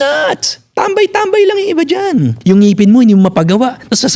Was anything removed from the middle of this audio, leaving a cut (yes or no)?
yes